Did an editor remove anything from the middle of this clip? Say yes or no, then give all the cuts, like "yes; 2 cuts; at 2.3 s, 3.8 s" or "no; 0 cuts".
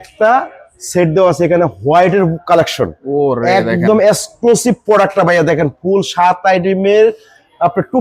no; 0 cuts